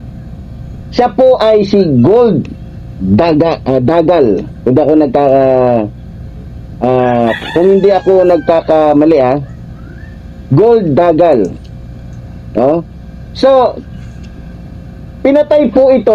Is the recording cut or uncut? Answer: uncut